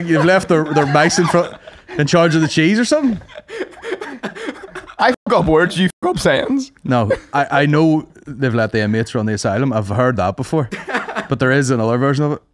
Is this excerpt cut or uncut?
uncut